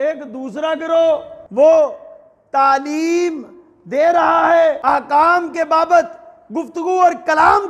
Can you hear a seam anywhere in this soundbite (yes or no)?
yes